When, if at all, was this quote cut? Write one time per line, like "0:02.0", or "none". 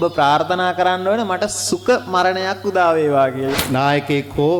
0:03.5